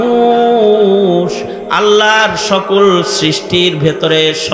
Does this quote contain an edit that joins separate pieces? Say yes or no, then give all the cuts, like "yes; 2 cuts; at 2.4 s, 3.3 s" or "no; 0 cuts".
no; 0 cuts